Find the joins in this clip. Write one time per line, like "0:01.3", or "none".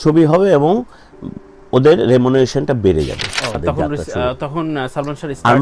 0:03.6